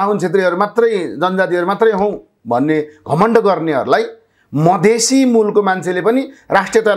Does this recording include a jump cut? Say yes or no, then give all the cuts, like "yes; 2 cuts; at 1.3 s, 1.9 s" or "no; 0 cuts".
no; 0 cuts